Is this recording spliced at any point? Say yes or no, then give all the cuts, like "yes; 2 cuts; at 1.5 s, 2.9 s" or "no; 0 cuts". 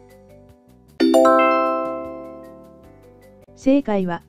yes; 1 cut; at 0.9 s